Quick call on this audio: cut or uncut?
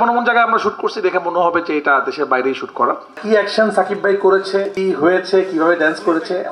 cut